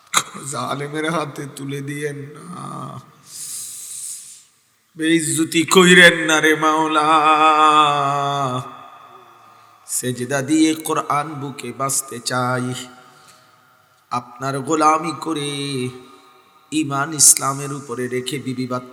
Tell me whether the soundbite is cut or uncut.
uncut